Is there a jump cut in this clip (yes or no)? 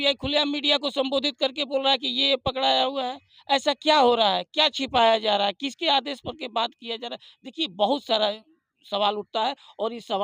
no